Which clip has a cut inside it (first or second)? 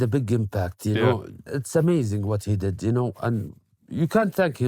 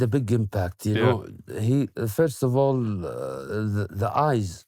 first